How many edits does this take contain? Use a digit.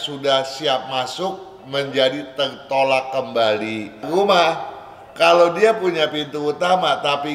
1